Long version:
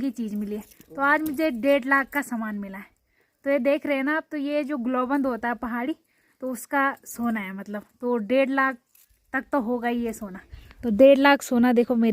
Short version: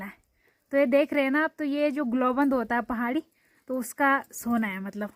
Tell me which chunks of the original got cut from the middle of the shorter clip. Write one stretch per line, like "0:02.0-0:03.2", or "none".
none